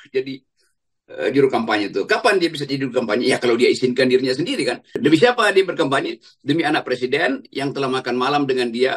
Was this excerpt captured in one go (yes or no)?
no